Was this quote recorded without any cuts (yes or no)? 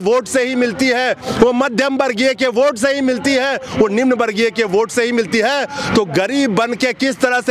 yes